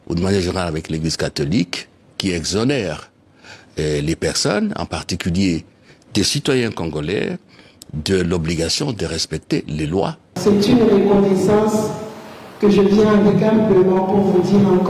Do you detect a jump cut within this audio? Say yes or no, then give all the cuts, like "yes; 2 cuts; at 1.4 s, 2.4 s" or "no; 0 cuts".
yes; 1 cut; at 10.3 s